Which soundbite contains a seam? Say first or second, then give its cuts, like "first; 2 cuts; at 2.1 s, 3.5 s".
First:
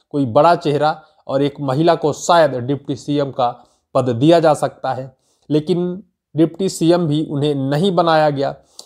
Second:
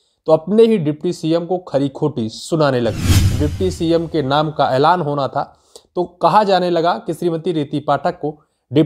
second; 1 cut; at 3.4 s